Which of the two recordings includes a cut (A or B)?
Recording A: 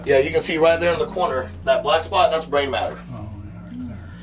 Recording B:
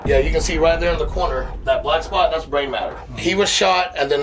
B